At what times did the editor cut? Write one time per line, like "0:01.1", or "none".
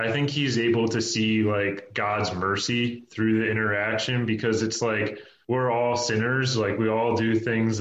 none